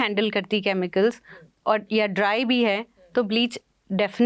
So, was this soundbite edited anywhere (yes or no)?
no